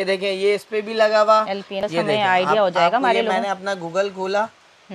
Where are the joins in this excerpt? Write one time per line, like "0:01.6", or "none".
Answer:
0:01.8